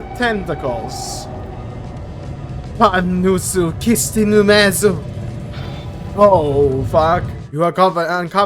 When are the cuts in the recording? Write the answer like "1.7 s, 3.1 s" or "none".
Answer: 7.4 s